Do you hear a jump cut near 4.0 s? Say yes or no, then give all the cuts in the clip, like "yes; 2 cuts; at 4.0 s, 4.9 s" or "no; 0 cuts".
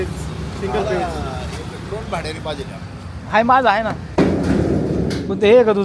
yes; 1 cut; at 4.0 s